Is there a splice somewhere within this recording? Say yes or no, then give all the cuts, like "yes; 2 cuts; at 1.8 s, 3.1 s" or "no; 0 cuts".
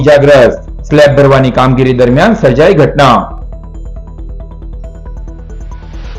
no; 0 cuts